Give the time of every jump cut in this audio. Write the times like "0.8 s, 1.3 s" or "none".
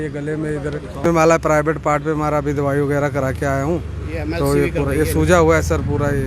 1.0 s